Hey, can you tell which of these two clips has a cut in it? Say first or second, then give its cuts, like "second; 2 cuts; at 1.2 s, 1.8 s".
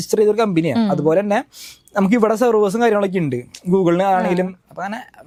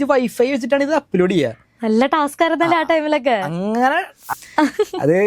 second; 1 cut; at 4.2 s